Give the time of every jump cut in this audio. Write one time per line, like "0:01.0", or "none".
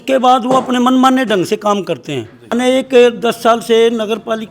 0:02.5